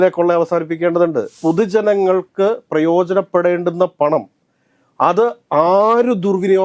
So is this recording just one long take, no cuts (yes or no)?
no